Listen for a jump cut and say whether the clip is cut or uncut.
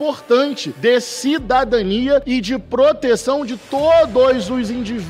uncut